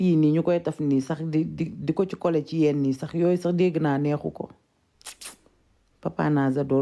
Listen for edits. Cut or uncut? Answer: uncut